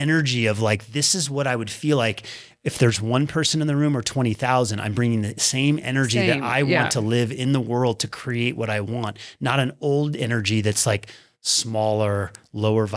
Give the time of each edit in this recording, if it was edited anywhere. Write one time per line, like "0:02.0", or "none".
none